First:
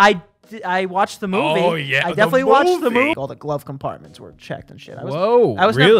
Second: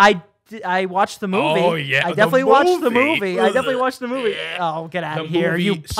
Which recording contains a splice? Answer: first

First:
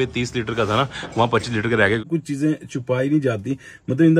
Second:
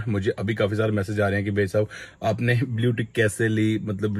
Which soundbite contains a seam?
first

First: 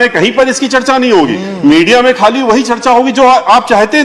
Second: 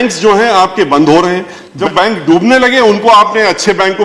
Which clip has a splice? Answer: second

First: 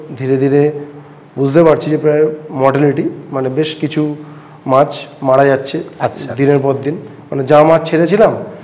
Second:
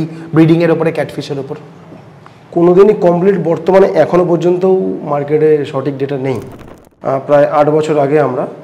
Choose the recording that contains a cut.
second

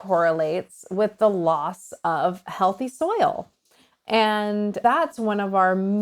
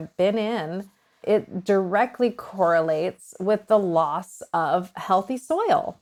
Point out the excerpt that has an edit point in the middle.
first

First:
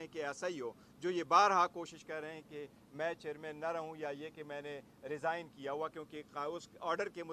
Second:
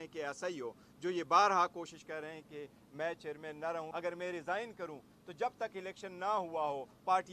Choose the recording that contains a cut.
second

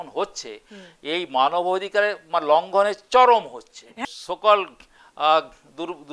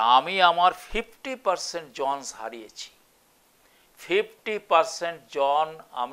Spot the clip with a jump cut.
first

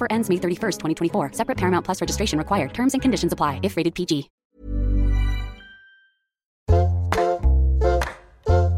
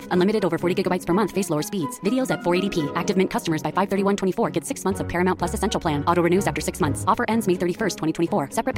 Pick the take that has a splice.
first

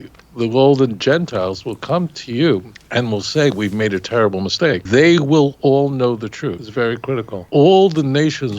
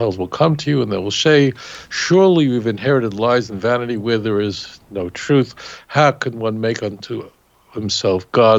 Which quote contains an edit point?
first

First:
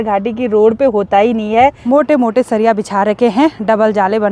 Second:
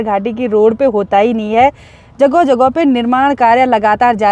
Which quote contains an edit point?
first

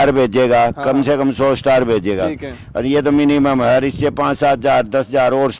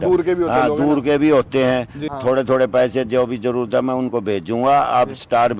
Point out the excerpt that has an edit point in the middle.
second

